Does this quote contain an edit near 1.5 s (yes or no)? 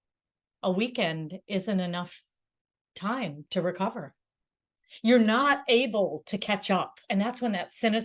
no